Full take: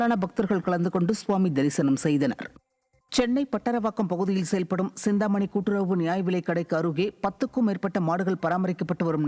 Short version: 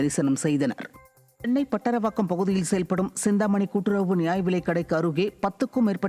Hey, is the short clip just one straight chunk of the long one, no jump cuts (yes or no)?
no